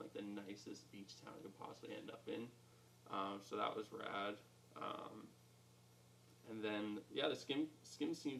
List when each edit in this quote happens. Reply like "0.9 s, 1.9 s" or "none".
none